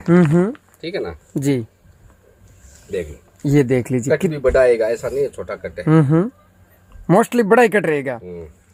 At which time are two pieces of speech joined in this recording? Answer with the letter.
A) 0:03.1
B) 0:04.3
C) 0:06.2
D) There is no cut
D